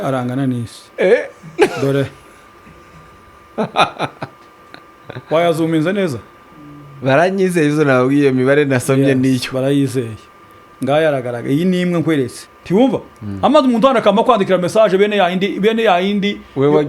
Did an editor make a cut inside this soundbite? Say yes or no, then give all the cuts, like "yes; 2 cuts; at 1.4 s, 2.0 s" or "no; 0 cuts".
yes; 1 cut; at 12.4 s